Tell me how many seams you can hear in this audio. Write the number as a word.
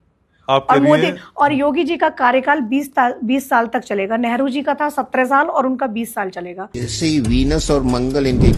one